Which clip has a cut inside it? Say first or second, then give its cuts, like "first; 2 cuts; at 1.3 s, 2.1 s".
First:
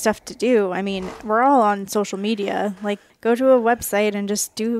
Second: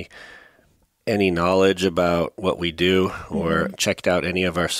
first; 1 cut; at 3.1 s